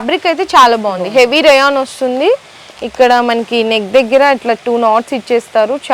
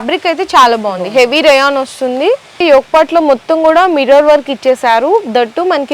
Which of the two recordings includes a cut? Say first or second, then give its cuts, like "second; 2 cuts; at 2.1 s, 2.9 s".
second; 1 cut; at 2.6 s